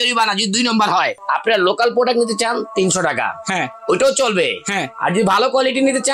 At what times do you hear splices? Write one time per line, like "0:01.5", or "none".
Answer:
0:01.1